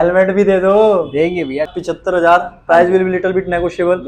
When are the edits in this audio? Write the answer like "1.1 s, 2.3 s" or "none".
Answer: 1.8 s